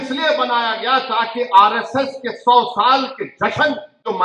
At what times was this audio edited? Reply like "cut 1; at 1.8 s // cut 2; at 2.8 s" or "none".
none

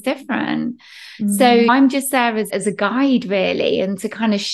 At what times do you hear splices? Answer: cut 1; at 2.5 s

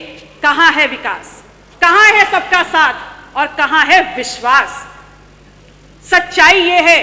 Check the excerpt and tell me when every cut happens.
none

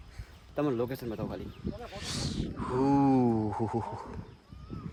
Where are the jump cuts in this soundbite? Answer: none

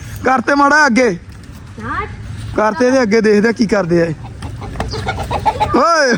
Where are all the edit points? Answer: none

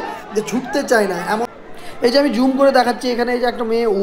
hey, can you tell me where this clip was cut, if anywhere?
cut 1; at 1.5 s

